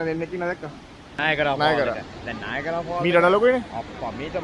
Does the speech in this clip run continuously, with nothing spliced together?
no; 1 cut; at 1.2 s

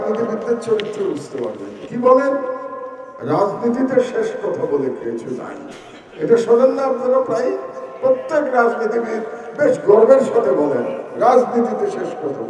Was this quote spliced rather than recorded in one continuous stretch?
no; 0 cuts

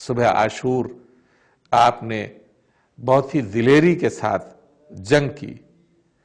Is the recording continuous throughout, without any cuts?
yes; 0 cuts

